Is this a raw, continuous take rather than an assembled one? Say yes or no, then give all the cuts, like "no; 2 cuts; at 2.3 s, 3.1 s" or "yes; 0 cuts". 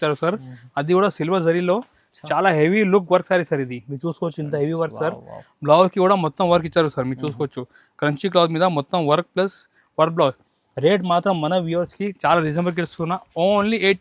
yes; 0 cuts